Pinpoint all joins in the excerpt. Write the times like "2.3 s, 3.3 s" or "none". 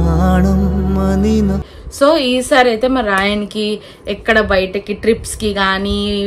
1.8 s